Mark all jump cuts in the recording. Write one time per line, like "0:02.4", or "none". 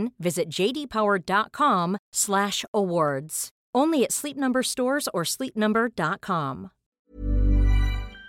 0:07.1

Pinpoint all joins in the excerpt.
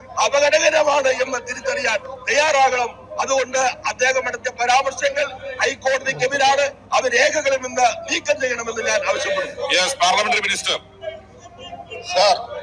none

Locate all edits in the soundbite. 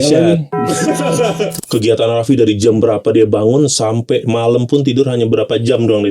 0:01.5

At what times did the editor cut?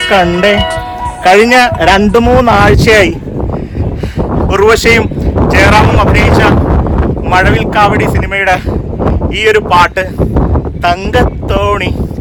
none

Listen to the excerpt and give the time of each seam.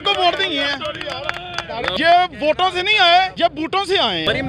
0:01.9
0:03.8

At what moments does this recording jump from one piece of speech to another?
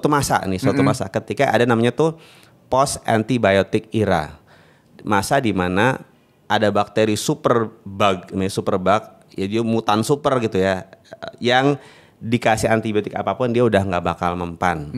none

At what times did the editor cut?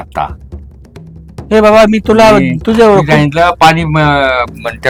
none

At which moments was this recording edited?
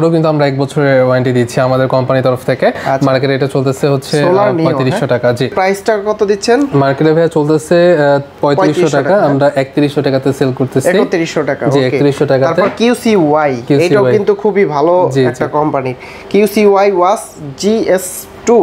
none

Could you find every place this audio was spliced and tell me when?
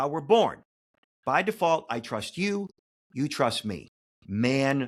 none

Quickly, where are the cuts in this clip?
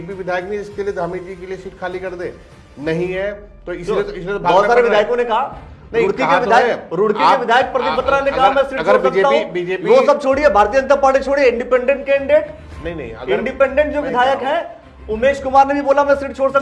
none

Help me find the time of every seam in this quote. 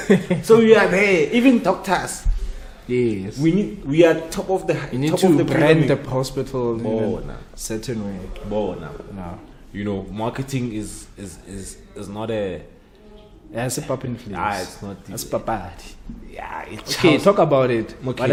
none

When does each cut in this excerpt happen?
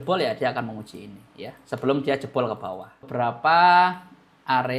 0:03.0

